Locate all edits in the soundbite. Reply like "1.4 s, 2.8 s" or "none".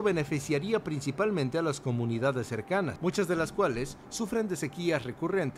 2.9 s